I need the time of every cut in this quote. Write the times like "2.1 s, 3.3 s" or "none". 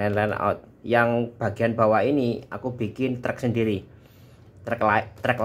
none